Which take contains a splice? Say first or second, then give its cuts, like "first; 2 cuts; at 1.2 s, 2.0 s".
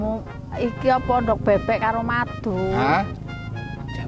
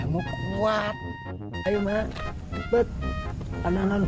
second; 1 cut; at 1.7 s